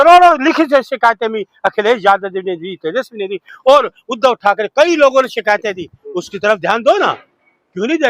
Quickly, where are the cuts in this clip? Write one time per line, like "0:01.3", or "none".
none